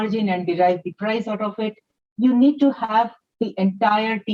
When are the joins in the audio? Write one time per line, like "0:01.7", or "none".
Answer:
none